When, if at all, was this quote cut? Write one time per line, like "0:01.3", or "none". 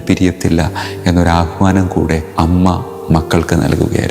0:02.2